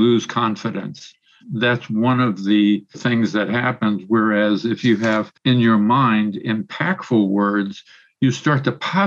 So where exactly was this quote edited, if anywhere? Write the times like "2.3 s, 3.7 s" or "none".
1.4 s, 3.0 s, 5.3 s